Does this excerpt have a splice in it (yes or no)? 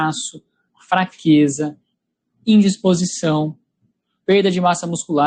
no